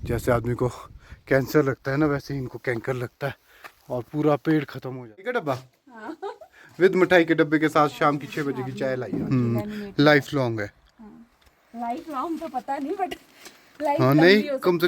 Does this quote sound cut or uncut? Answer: cut